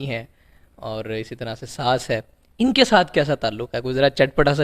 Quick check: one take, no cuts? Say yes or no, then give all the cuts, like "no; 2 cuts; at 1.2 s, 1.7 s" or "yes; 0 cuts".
yes; 0 cuts